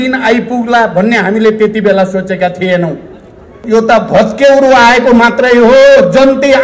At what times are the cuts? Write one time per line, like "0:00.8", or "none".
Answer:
0:03.6